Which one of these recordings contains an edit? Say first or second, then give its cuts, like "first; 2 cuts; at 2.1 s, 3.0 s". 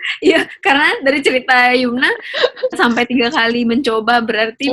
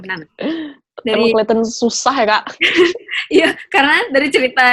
first; 1 cut; at 2.8 s